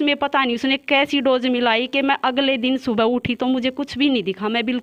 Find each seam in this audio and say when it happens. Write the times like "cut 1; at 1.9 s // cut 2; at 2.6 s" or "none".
none